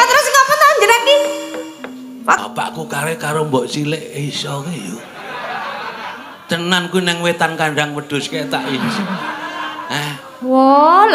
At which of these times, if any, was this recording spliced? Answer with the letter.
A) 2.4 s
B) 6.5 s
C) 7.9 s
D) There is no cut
A